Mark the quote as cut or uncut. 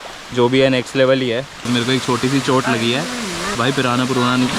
cut